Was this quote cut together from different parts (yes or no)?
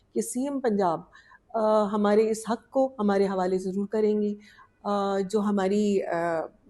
no